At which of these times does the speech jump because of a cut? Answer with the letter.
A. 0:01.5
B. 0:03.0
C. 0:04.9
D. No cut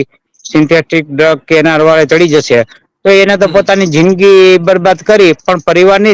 D